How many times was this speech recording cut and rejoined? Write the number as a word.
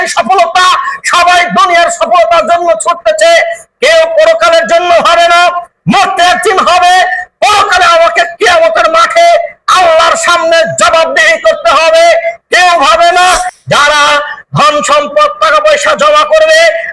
one